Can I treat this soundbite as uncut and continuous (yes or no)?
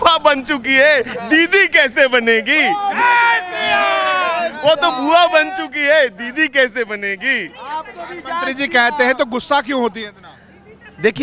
yes